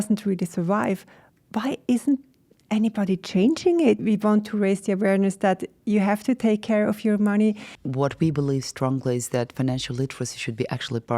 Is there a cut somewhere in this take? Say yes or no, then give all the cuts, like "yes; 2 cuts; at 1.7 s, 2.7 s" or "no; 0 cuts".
yes; 2 cuts; at 4.0 s, 7.8 s